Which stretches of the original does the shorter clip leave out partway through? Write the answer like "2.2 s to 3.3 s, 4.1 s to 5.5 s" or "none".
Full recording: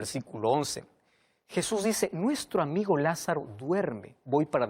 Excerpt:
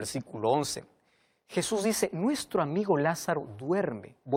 none